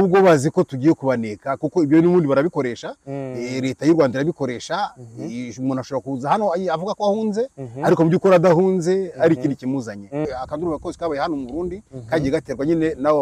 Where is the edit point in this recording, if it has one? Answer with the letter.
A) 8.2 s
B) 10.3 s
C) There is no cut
B